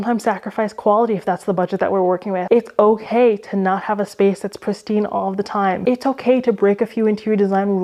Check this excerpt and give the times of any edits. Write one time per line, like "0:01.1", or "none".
0:02.4
0:05.8